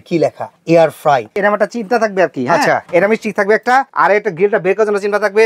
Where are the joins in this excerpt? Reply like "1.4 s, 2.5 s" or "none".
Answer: 1.3 s, 2.8 s, 3.9 s